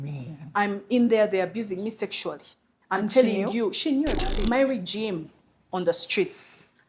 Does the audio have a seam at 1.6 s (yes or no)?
no